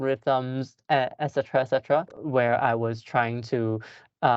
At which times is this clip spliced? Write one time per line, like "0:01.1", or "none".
0:02.2